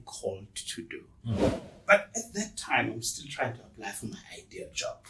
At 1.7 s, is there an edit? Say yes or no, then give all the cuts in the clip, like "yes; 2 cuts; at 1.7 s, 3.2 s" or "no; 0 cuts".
yes; 1 cut; at 1.7 s